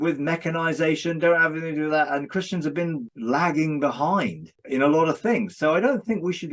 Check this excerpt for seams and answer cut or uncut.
cut